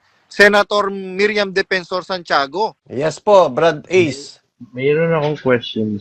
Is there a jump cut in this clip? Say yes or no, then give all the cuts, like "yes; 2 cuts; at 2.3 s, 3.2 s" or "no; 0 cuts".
yes; 1 cut; at 2.8 s